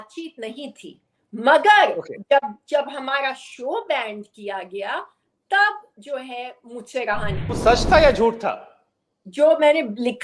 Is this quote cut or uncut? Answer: cut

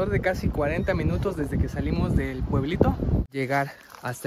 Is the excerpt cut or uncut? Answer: cut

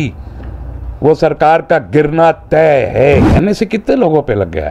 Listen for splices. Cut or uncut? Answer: cut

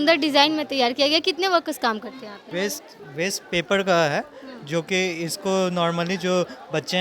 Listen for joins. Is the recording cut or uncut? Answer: cut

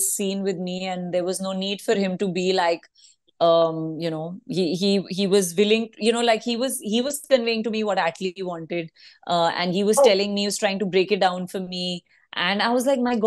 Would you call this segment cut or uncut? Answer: uncut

